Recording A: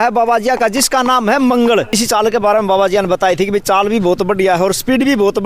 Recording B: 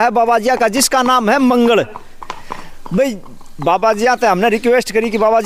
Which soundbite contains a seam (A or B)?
A